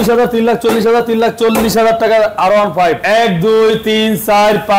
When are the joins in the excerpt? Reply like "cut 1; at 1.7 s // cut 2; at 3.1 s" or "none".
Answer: cut 1; at 3.0 s